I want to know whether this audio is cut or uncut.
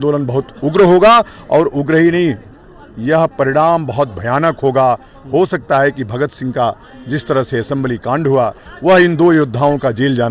uncut